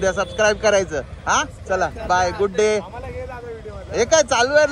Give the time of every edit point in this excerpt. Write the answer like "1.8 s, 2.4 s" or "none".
none